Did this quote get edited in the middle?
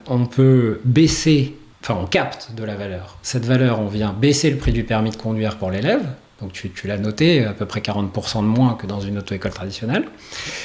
yes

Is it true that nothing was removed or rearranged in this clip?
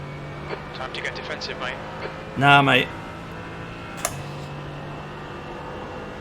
yes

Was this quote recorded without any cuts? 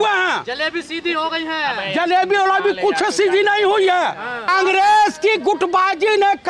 no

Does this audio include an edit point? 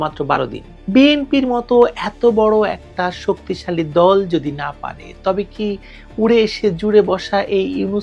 no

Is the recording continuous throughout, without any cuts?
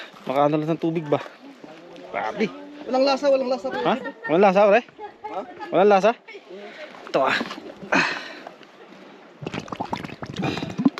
yes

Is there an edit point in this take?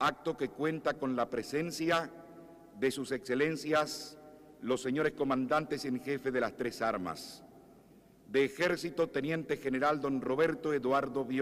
no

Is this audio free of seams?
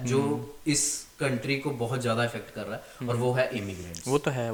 yes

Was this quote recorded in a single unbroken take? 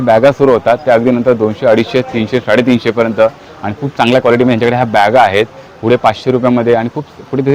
yes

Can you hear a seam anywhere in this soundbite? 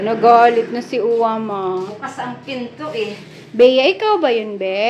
no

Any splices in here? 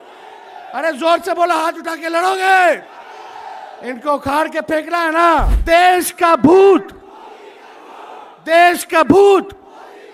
yes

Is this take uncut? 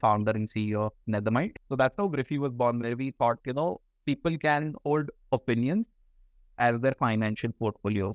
no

